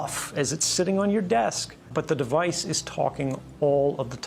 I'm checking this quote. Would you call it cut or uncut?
cut